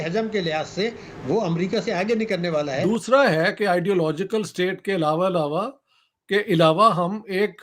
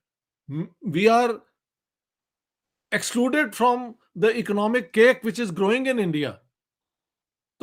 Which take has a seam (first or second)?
first